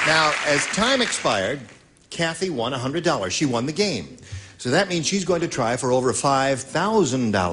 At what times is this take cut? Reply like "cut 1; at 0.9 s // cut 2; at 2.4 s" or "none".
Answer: cut 1; at 2.9 s